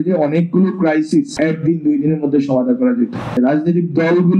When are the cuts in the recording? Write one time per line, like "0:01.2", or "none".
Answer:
0:01.3
0:03.3